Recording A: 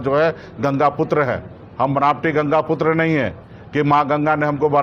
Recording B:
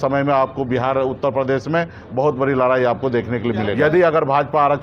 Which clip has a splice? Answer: B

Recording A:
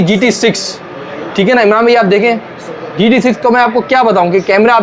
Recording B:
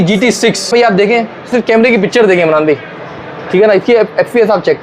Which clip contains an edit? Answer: B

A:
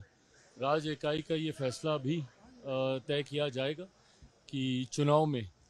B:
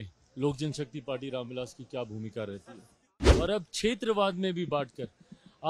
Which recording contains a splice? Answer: B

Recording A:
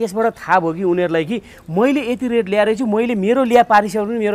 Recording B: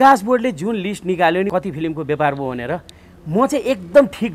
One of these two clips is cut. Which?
B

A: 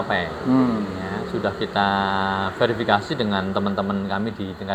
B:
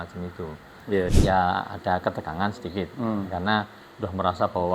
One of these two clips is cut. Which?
B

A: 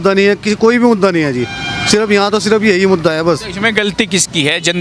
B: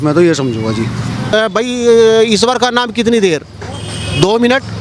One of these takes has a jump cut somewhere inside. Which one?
B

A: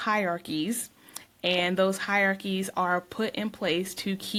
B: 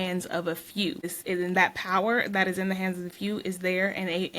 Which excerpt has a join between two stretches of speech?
B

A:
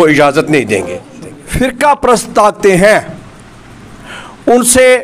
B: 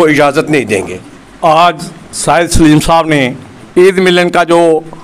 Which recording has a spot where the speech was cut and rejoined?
A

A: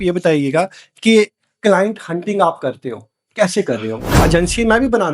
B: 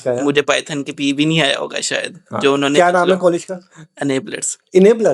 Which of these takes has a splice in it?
A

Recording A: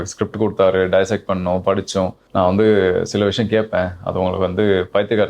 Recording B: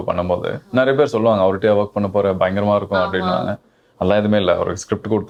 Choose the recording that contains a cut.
A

